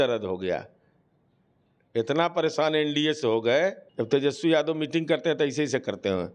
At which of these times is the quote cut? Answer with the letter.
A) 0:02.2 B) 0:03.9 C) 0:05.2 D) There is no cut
B